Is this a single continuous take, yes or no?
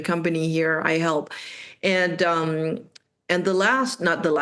yes